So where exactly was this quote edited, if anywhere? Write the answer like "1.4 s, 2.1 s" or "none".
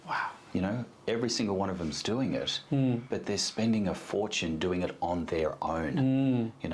none